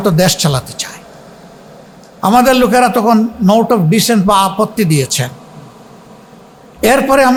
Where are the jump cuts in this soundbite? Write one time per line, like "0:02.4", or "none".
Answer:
none